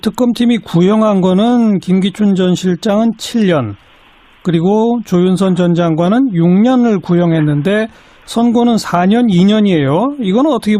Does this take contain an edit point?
yes; 1 cut; at 5.6 s

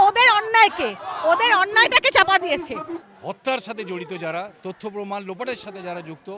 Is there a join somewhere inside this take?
yes; 1 cut; at 3.0 s

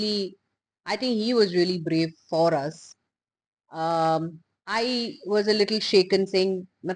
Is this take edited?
no; 0 cuts

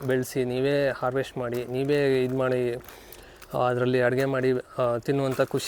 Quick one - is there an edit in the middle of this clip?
no; 0 cuts

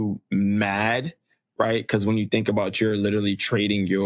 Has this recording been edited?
no; 0 cuts

